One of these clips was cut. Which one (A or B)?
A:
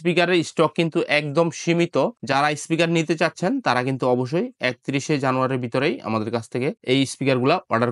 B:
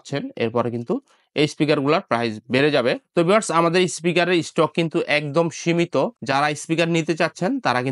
B